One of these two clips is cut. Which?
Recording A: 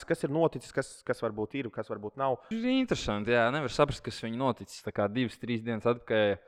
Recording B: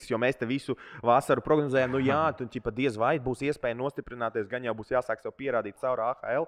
A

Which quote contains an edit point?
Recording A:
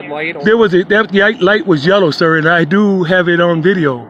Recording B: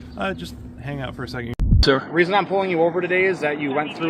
B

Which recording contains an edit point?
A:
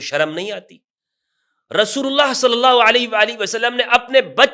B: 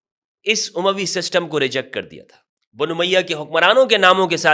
B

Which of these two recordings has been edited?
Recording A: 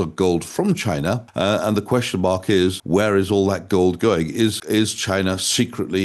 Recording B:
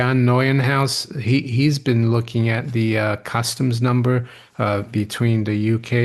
A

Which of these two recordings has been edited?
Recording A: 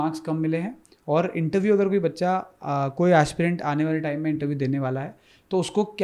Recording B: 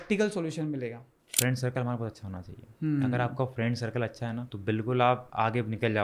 B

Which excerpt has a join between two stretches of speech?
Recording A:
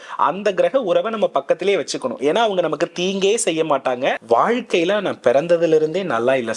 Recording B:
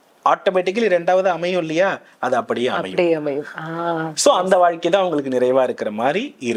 A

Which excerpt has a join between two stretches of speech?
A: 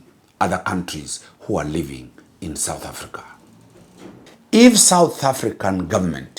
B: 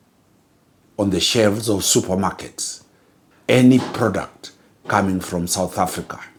A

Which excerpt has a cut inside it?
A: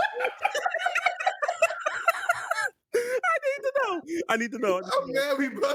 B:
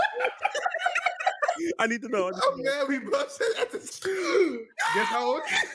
B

